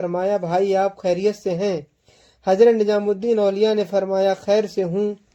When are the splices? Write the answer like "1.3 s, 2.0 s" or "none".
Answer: none